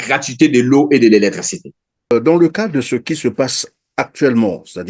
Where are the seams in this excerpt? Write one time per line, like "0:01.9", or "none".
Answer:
0:02.1